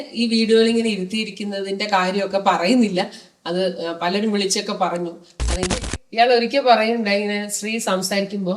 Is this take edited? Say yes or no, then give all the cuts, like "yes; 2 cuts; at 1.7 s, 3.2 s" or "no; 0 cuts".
yes; 1 cut; at 5.7 s